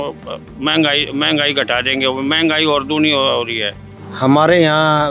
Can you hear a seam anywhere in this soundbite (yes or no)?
yes